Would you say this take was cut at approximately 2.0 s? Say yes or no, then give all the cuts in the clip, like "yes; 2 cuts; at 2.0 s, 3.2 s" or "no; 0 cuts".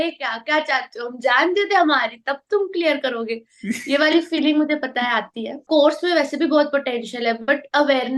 no; 1 cut; at 5.6 s